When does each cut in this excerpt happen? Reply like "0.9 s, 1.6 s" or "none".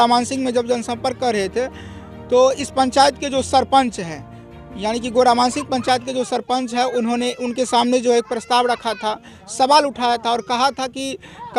none